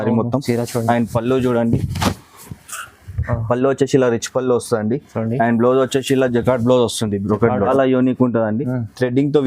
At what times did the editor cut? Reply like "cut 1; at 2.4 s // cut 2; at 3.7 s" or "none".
cut 1; at 7.7 s

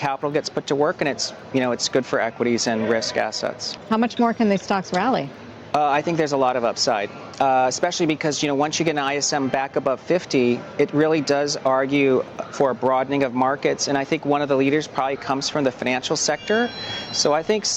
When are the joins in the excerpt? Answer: cut 1; at 7.2 s

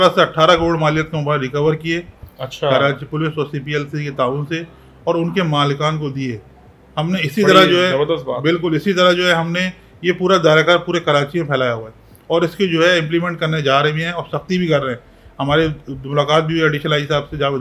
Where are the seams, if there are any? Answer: none

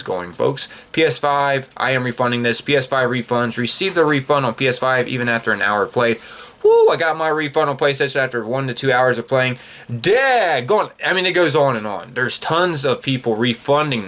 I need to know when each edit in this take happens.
none

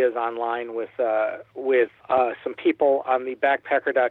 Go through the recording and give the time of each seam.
cut 1; at 2.0 s

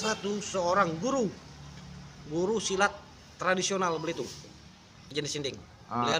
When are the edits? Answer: cut 1; at 5.0 s

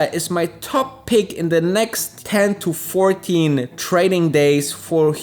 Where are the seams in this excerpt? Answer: cut 1; at 2.1 s

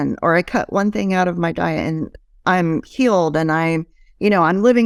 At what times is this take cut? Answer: none

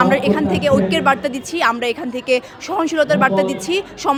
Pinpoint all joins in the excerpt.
none

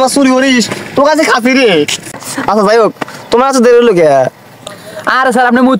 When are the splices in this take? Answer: cut 1; at 2.2 s

